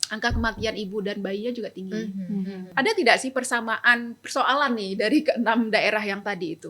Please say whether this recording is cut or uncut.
cut